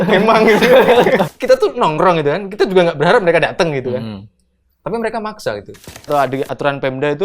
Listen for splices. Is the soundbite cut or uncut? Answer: cut